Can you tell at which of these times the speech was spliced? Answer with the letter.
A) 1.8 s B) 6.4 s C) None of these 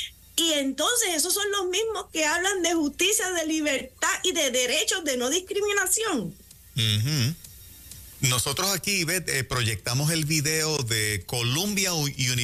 C